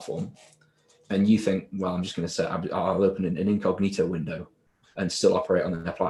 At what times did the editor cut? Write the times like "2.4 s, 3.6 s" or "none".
none